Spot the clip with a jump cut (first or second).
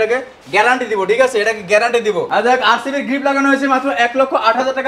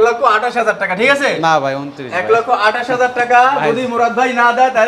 first